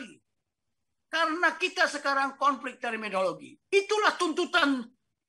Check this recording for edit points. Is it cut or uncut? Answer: uncut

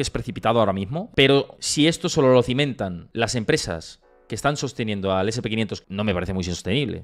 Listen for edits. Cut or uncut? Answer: cut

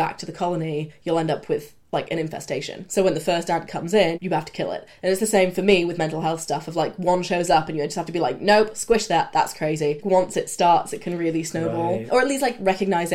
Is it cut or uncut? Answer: cut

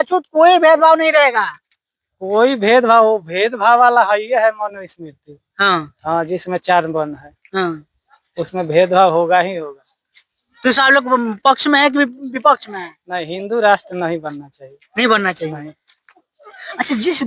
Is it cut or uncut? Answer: uncut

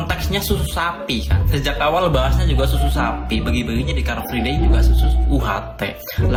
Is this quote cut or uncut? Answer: uncut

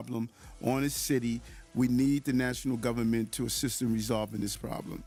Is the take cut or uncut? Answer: uncut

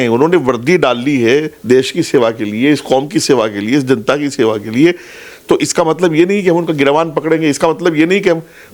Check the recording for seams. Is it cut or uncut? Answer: uncut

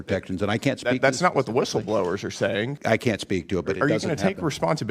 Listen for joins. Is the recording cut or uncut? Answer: cut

